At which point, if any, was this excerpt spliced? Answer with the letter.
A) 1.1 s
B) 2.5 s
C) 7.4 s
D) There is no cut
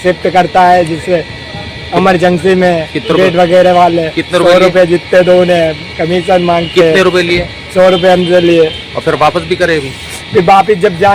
D